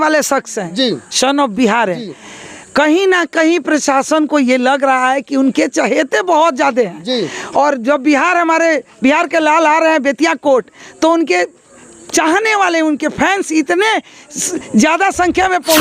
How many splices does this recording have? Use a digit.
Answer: 0